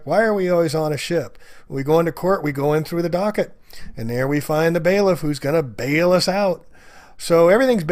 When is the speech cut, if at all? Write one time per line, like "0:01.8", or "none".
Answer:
none

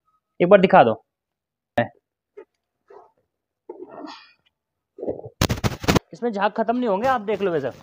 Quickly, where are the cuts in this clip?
0:02.0
0:06.0

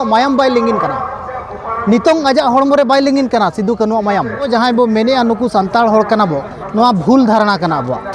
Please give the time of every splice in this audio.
0:04.5

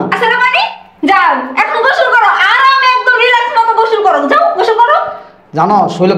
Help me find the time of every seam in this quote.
none

